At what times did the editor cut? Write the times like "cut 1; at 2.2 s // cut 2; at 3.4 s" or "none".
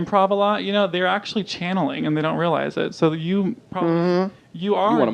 cut 1; at 3.8 s